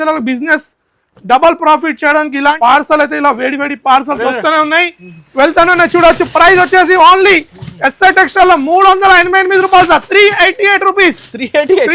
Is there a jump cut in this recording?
yes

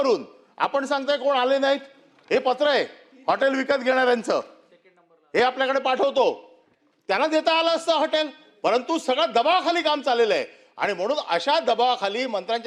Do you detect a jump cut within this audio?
no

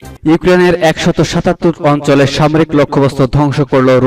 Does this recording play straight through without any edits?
yes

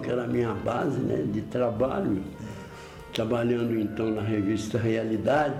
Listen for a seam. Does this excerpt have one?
no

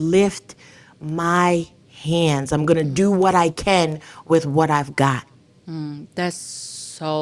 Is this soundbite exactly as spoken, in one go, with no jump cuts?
yes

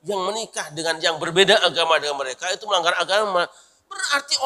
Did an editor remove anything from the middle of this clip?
no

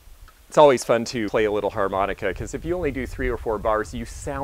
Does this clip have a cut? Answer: yes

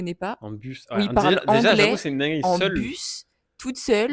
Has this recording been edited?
no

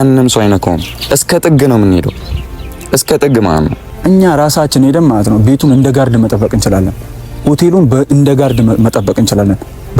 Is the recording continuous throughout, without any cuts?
no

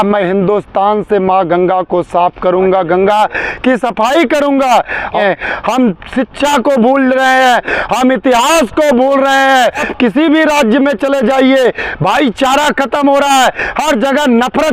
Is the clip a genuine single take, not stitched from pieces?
no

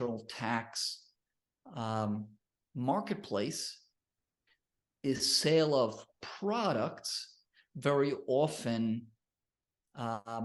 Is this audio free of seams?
yes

